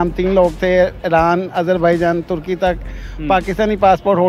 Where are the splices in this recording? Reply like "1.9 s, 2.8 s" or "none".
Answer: none

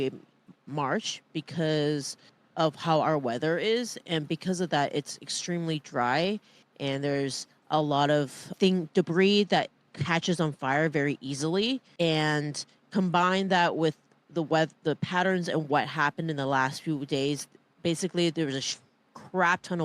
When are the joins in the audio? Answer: 11.9 s

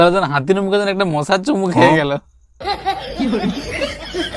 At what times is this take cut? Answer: 2.6 s

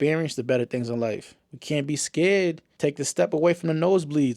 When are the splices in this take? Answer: 2.8 s

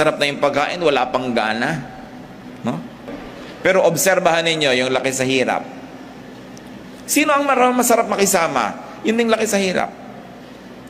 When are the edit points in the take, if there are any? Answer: 3.0 s

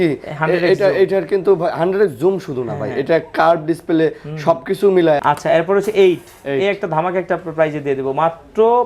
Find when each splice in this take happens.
5.2 s

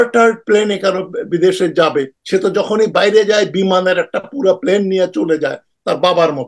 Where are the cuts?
2.2 s

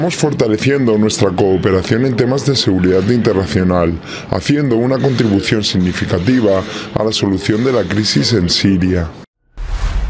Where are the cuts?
9.2 s

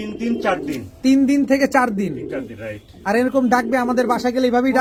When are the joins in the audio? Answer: none

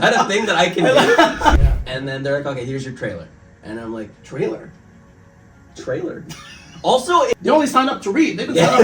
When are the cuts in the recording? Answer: 1.6 s, 7.3 s

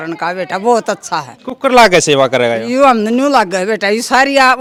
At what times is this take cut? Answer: none

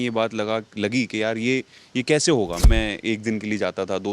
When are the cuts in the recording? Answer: 2.6 s

